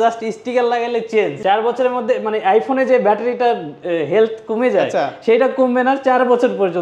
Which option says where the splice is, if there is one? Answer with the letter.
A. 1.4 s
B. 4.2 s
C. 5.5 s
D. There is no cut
A